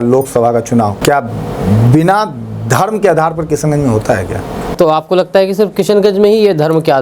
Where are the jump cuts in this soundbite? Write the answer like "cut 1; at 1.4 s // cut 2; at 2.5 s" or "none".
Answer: cut 1; at 1.0 s // cut 2; at 4.7 s